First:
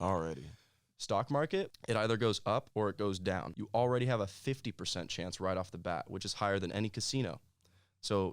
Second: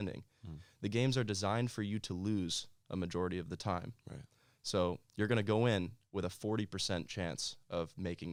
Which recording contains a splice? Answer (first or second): first